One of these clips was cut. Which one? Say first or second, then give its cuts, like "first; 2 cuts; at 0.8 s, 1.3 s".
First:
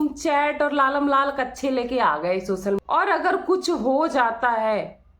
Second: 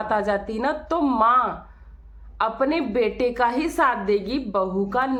first; 1 cut; at 2.8 s